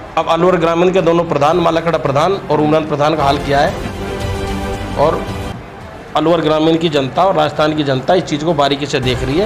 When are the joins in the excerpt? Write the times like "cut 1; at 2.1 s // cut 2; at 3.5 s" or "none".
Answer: cut 1; at 4.3 s